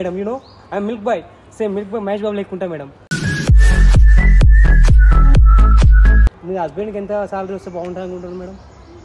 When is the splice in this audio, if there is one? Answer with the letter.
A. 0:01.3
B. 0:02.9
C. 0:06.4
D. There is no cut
C